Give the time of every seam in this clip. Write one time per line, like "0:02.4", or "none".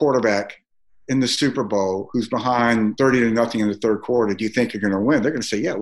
0:02.9